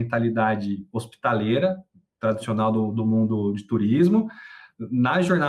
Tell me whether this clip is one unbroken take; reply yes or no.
yes